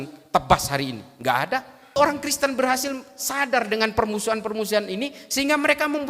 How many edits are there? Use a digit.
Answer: 1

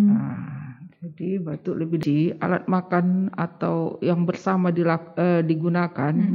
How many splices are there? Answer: 1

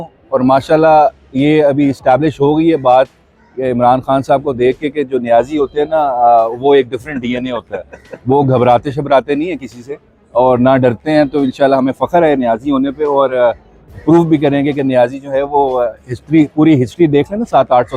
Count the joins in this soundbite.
0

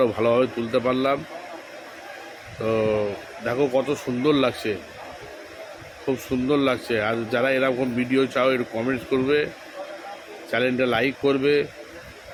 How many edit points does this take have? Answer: 0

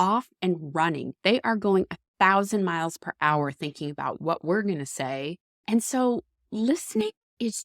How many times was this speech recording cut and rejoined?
1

